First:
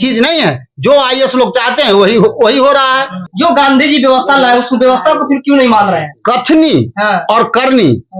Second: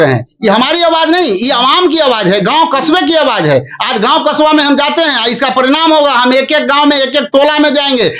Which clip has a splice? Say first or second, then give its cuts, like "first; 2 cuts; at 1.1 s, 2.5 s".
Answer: first; 1 cut; at 3.2 s